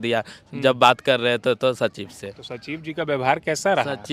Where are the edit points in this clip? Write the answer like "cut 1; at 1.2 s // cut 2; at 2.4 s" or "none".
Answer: none